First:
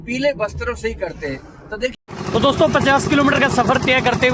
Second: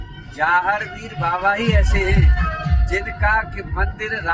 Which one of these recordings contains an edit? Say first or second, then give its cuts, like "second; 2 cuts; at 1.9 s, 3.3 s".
first; 1 cut; at 1.9 s